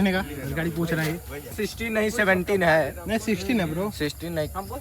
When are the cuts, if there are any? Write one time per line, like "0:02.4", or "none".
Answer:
0:01.5